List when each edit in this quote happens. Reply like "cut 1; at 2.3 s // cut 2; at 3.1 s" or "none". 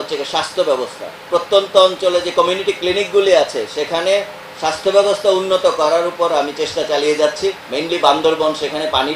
cut 1; at 1.2 s // cut 2; at 7.7 s